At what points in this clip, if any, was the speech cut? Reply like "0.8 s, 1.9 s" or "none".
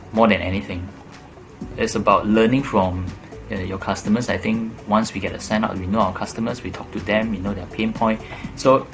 1.6 s

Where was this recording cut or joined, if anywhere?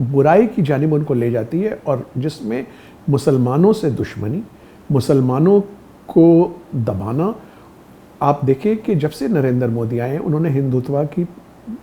none

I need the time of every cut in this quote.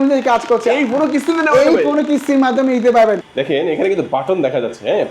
3.3 s

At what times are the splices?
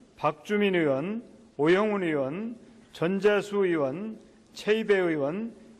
none

